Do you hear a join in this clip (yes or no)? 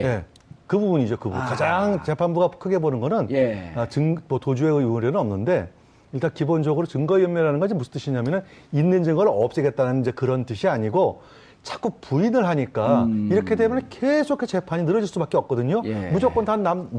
yes